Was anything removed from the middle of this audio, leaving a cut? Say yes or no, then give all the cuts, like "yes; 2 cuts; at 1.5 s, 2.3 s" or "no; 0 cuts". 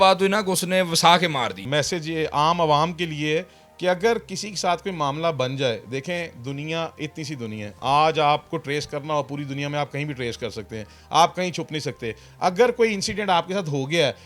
yes; 1 cut; at 1.6 s